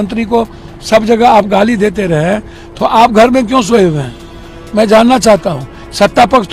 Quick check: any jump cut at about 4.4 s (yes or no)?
no